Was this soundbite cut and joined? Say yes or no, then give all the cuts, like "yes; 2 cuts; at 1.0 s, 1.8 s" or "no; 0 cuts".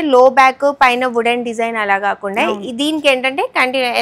no; 0 cuts